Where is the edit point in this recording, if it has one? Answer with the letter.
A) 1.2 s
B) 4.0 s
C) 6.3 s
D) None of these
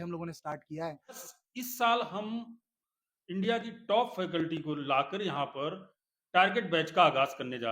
A